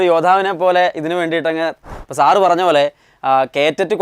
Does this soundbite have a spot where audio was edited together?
yes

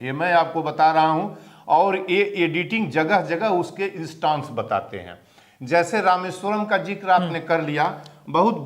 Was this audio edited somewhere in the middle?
no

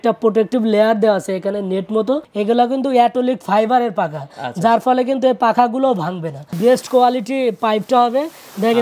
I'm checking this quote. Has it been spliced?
yes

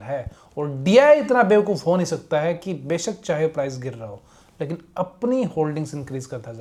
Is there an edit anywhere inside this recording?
no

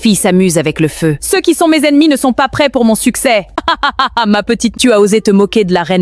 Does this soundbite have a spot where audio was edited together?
yes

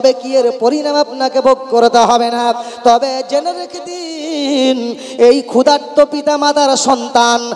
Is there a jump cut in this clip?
no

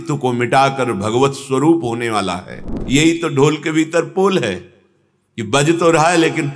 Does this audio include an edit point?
yes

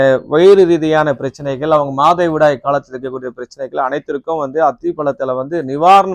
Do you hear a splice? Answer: no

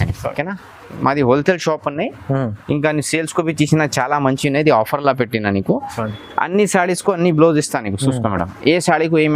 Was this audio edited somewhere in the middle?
yes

